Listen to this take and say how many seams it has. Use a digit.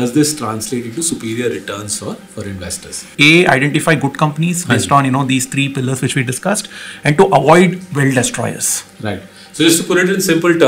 1